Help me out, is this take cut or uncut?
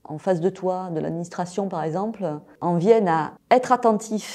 cut